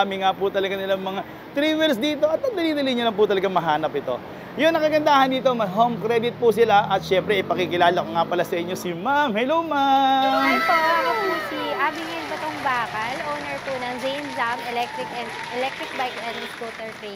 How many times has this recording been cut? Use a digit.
0